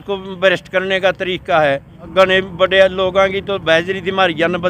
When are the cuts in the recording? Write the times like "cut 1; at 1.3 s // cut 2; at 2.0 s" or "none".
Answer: cut 1; at 2.0 s